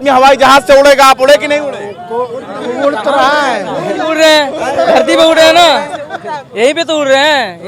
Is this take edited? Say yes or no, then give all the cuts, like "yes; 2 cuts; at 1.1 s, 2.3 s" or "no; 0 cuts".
no; 0 cuts